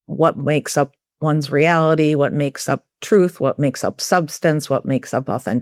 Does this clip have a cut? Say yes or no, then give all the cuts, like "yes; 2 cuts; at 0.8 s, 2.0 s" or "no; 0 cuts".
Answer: no; 0 cuts